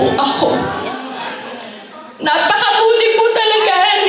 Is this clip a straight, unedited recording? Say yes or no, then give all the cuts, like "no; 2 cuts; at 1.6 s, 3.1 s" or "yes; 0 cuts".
yes; 0 cuts